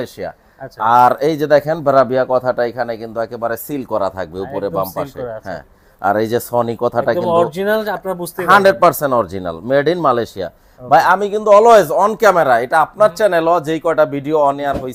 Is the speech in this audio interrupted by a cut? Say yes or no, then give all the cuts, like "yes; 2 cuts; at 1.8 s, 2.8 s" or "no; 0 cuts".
no; 0 cuts